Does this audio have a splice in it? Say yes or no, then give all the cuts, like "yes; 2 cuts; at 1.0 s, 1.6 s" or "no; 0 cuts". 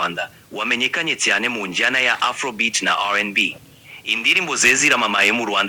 no; 0 cuts